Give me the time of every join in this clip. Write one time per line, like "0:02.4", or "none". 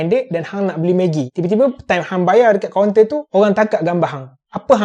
none